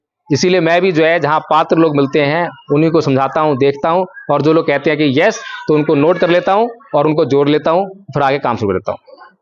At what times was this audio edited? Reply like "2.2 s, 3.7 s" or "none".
none